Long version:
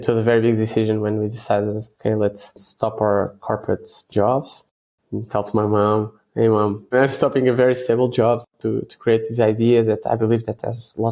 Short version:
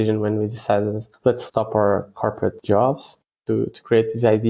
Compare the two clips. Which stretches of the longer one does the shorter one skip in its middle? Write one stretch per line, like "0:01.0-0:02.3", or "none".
0:01.9-0:02.4
0:03.8-0:04.1
0:04.8-0:08.5